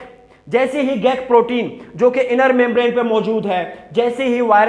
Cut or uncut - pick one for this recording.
uncut